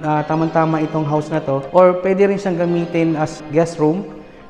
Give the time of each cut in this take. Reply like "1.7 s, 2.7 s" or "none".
1.6 s, 3.4 s